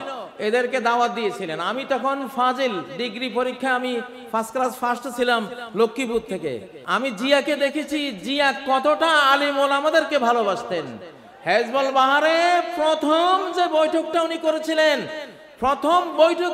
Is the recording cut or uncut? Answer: cut